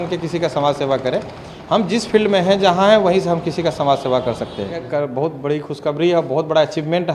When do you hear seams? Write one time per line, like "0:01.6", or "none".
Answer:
0:04.9